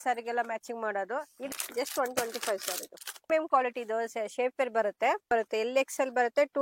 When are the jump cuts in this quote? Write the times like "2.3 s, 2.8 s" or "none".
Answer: 1.5 s, 3.3 s, 5.2 s